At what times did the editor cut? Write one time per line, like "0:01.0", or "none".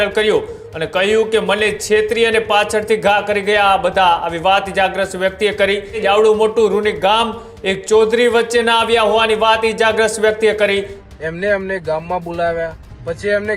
0:06.0
0:11.0